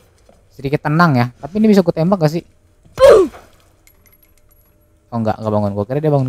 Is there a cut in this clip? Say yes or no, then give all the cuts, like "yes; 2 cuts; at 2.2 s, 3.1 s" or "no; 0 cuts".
no; 0 cuts